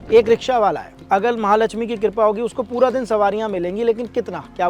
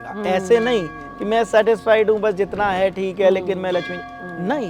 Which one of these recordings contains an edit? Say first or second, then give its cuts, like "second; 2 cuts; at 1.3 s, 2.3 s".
first; 1 cut; at 0.9 s